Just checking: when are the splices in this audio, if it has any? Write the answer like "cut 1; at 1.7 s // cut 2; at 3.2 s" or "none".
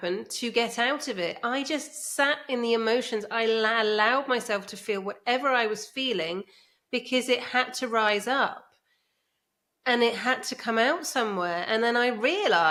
none